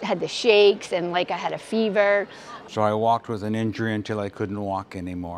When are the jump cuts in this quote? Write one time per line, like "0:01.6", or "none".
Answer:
0:02.6